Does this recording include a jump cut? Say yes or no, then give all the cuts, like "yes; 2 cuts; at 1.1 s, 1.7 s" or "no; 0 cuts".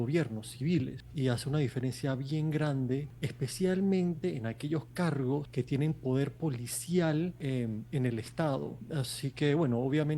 yes; 5 cuts; at 1.0 s, 3.2 s, 5.5 s, 7.4 s, 8.8 s